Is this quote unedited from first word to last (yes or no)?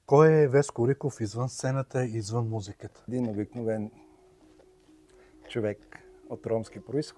no